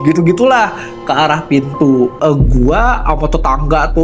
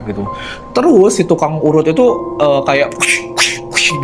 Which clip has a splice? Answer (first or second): first